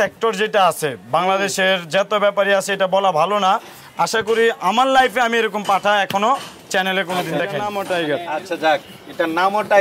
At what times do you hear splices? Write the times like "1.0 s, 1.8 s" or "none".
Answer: 7.7 s